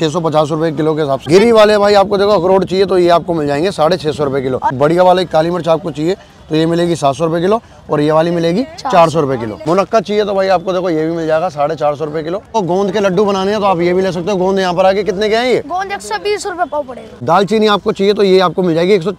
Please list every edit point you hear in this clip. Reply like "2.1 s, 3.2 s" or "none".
1.3 s, 4.8 s, 9.5 s, 12.5 s, 17.1 s